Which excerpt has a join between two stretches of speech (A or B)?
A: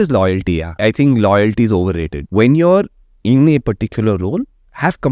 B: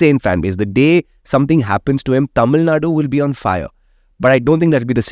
A